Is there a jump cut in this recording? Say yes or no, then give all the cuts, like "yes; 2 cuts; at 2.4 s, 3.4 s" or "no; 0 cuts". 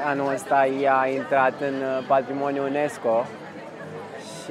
no; 0 cuts